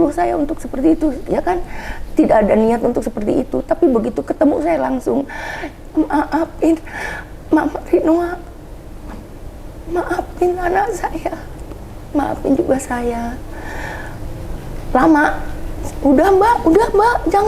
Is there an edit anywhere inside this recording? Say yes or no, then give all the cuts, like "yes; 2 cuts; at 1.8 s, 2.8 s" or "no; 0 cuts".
no; 0 cuts